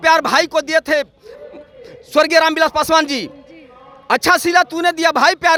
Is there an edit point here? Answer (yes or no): no